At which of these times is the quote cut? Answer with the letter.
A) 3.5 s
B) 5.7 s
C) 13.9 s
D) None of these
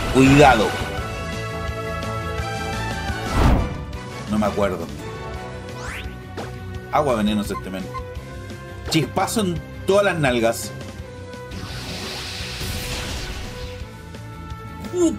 A